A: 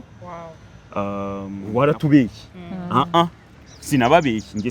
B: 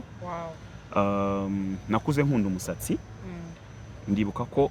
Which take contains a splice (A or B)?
A